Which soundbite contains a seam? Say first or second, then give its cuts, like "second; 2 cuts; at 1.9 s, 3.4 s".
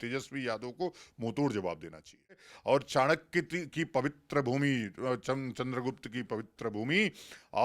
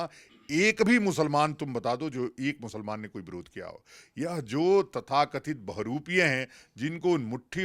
first; 1 cut; at 2.5 s